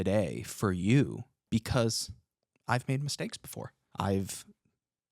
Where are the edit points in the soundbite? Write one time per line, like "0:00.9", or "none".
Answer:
0:01.3
0:03.8